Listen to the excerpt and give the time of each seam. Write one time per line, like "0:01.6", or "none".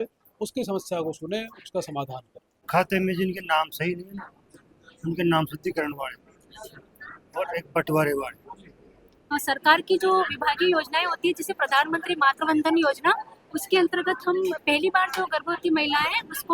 0:02.5
0:09.3